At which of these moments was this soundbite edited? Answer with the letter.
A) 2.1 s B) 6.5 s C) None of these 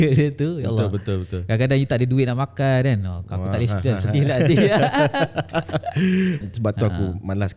B